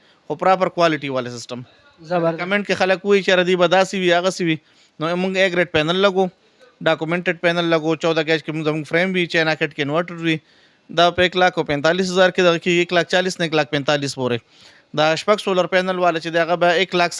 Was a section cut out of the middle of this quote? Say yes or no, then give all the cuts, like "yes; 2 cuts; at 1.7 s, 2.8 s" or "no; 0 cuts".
no; 0 cuts